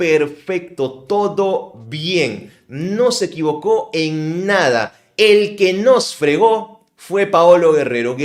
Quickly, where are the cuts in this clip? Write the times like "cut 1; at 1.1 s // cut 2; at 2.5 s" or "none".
none